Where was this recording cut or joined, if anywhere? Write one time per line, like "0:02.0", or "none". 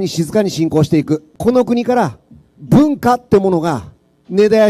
0:01.3

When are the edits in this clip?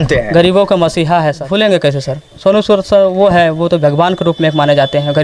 0:01.4

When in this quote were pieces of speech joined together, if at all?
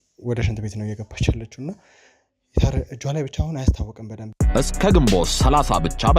0:04.2

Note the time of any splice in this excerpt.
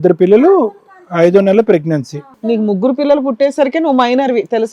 0:02.2

